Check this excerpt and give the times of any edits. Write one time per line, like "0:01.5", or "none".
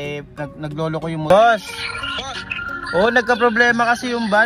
0:01.3